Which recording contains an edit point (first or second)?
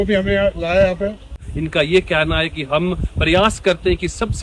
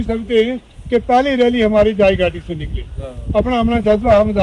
first